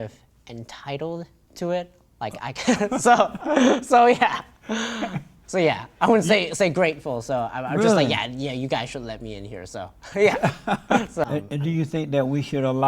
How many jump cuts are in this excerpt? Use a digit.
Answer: 1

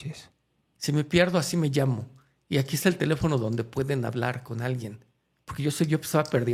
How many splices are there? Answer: 0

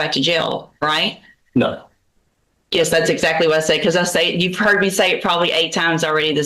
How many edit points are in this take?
0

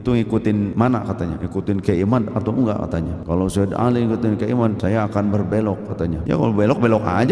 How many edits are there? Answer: 4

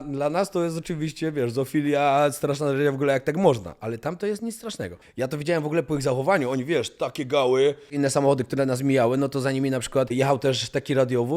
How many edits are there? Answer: 3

